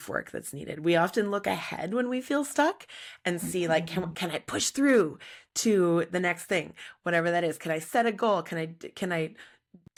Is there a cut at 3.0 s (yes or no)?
no